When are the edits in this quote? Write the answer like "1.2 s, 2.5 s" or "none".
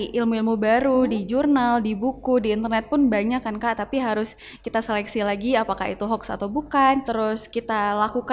7.1 s